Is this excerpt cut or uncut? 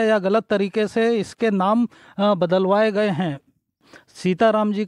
uncut